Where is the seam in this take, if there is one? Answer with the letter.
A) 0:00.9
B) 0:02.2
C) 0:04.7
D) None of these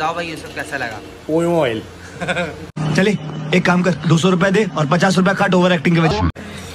D